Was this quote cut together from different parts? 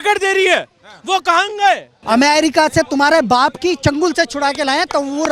yes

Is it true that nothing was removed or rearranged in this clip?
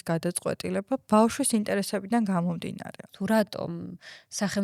no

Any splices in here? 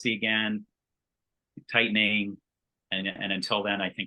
yes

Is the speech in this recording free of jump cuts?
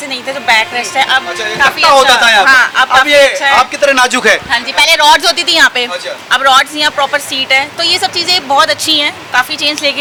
yes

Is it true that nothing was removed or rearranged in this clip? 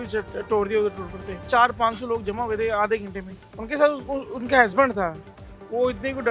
yes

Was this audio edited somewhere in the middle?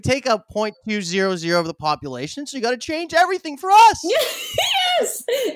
yes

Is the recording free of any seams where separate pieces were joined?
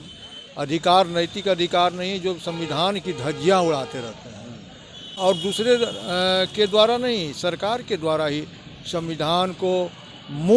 no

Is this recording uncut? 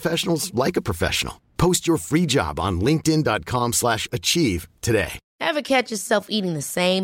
no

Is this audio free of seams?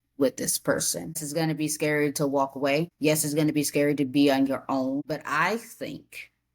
no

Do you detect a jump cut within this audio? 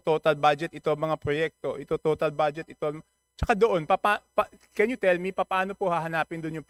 no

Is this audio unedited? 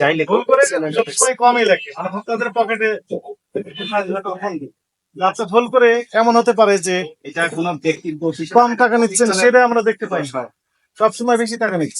yes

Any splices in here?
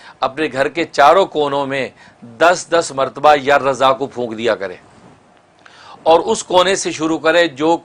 no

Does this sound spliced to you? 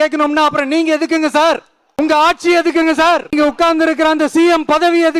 yes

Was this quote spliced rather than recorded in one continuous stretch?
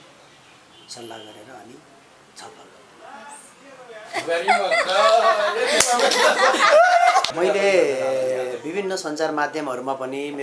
yes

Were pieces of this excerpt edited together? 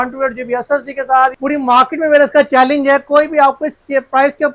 yes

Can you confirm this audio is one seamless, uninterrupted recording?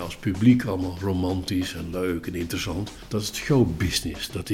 no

